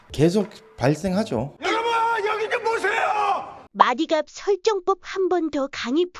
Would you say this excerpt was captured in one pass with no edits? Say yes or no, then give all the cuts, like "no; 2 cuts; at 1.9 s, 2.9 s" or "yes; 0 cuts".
no; 1 cut; at 3.6 s